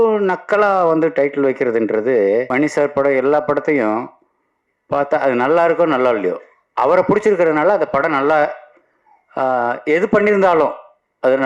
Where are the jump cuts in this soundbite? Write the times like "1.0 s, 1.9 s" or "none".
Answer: 2.5 s